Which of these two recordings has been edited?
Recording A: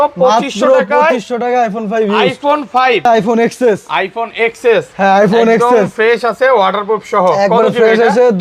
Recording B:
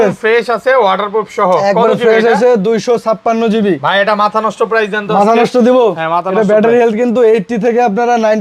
A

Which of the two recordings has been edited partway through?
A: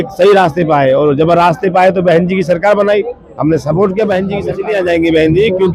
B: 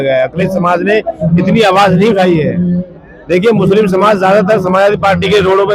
A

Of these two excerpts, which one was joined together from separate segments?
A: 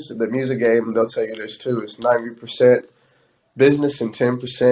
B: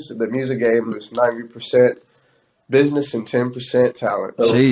B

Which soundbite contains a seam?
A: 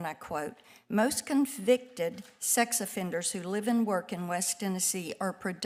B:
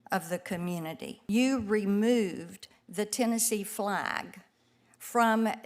B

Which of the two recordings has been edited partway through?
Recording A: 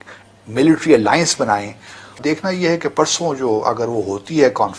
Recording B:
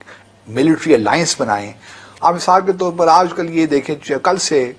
A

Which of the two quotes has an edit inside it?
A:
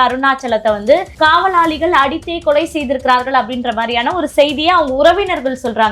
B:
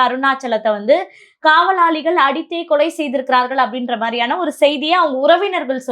A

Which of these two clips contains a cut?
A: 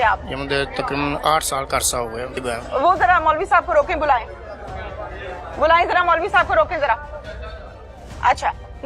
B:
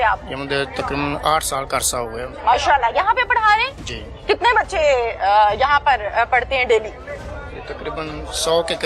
A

